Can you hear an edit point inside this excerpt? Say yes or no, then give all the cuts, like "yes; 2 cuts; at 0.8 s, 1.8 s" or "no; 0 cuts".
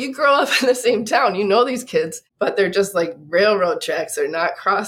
yes; 1 cut; at 2.2 s